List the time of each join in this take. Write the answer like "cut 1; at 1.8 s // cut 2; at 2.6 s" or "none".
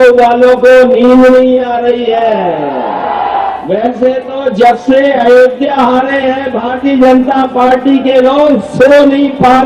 cut 1; at 3.6 s